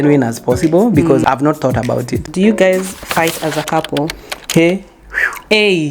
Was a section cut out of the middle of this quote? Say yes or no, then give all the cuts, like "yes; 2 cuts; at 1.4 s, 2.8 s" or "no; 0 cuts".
yes; 1 cut; at 2.3 s